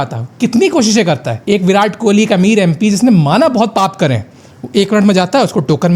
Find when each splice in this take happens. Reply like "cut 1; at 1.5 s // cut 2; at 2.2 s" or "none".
cut 1; at 1.3 s